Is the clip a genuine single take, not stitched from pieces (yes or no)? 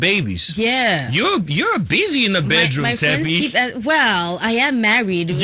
yes